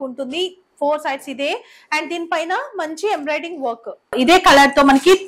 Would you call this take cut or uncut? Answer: cut